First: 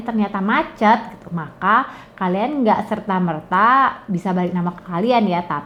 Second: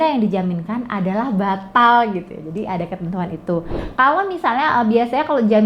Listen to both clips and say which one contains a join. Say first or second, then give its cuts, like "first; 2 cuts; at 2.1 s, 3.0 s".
second; 1 cut; at 3.8 s